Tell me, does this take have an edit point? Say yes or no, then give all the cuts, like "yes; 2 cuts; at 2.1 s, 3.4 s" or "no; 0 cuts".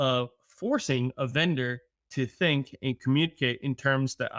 no; 0 cuts